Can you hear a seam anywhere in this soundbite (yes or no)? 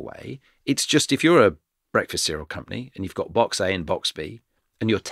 no